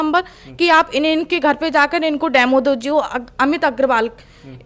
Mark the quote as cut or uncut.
uncut